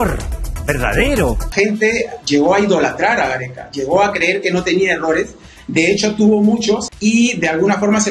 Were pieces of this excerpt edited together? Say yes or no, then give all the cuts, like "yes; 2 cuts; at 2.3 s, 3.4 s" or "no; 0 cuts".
yes; 2 cuts; at 1.5 s, 6.9 s